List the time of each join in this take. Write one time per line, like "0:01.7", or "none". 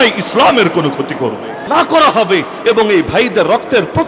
0:01.6